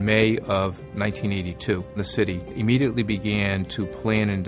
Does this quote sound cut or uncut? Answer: cut